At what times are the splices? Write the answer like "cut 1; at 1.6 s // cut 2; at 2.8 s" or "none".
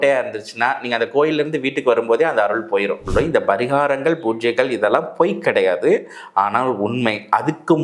cut 1; at 3.0 s